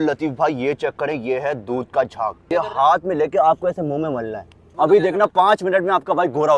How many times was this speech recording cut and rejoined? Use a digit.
2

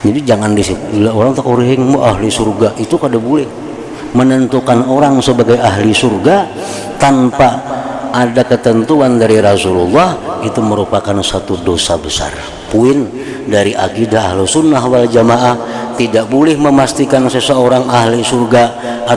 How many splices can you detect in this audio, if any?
1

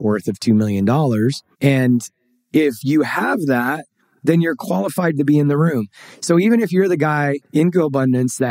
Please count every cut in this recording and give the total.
1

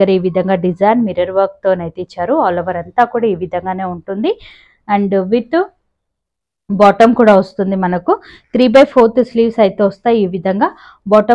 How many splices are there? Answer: 0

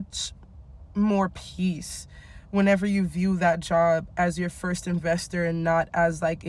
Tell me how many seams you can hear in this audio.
0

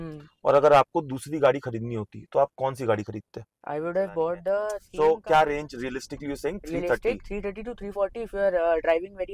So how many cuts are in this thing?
1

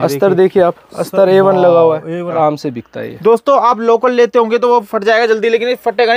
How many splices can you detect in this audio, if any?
1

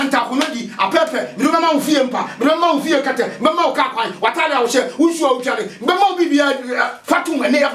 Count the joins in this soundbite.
0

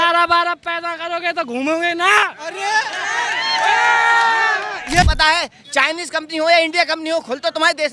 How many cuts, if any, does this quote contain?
1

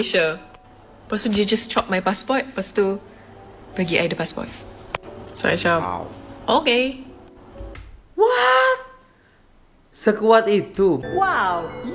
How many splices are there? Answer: 1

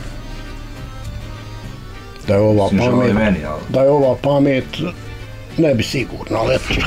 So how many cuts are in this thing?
0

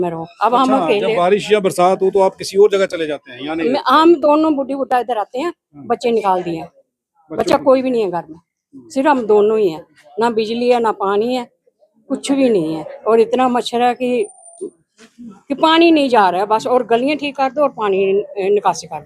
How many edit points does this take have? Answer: 0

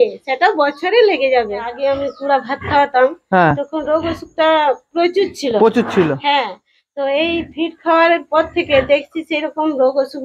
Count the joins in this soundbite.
1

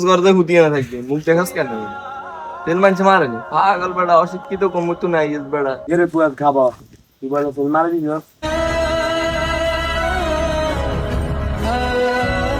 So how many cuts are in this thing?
2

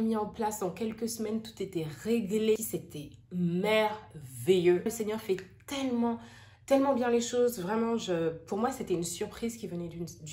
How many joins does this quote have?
2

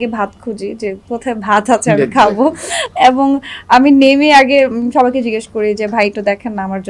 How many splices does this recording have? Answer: 0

